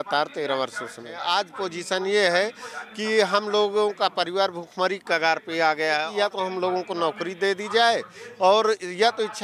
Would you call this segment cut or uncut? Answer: cut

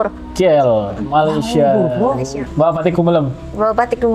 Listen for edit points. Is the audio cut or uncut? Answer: cut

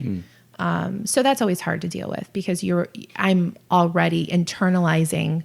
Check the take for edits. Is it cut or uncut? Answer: uncut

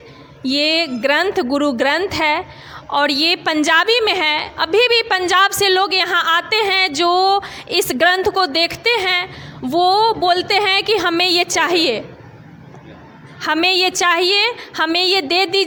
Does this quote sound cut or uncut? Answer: uncut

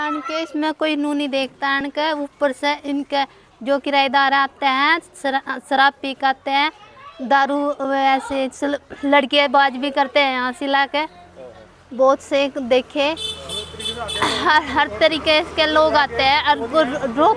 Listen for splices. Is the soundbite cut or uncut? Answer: uncut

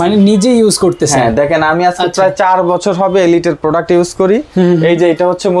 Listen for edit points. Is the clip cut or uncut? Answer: uncut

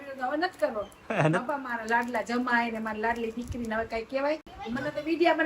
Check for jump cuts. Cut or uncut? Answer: cut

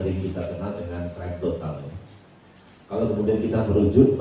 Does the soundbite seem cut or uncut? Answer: uncut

